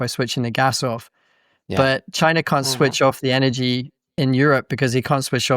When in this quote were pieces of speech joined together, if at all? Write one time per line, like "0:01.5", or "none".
0:04.1